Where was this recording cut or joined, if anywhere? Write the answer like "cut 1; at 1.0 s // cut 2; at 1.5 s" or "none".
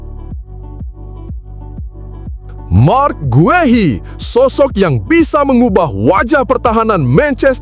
none